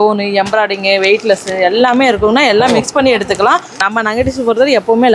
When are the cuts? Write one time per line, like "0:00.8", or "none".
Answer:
0:03.8